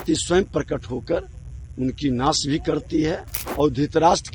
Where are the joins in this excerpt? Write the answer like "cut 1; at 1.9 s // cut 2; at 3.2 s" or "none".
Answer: cut 1; at 3.4 s